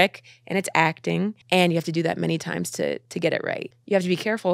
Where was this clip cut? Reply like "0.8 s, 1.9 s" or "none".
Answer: 1.4 s, 3.6 s